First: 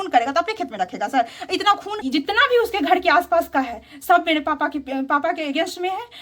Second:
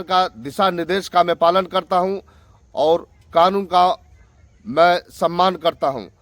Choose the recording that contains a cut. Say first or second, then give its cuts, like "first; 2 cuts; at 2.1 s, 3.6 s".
first; 1 cut; at 2.0 s